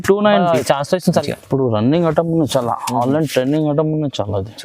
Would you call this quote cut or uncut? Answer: cut